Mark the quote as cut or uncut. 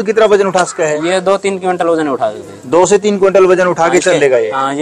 uncut